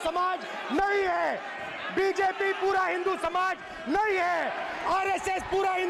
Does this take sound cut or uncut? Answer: uncut